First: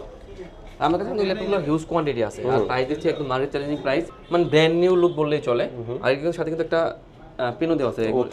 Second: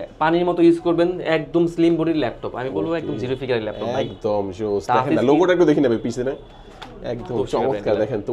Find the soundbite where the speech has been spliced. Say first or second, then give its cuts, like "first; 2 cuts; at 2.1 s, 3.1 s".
first; 1 cut; at 4.2 s